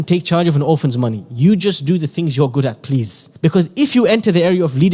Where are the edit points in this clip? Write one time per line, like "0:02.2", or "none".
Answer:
0:03.2